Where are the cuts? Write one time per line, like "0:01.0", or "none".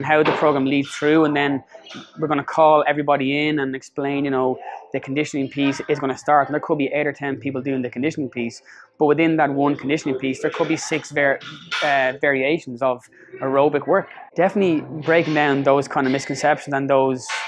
0:14.2